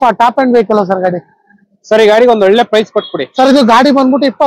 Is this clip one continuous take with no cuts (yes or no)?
yes